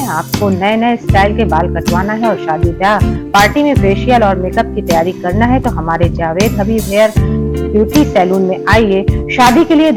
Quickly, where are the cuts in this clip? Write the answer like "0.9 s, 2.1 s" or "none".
none